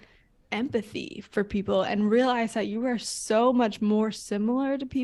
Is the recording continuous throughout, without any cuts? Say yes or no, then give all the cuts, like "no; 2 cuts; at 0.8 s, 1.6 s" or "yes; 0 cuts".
yes; 0 cuts